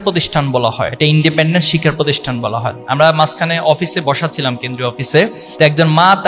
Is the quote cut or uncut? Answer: cut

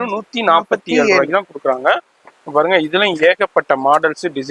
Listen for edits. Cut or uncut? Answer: uncut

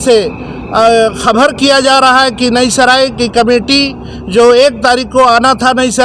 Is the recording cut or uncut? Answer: uncut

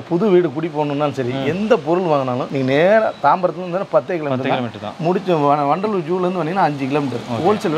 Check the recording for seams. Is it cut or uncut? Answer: cut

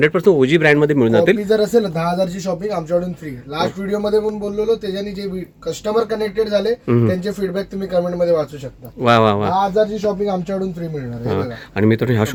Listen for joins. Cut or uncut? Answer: uncut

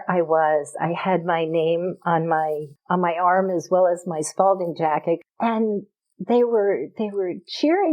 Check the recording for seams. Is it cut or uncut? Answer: cut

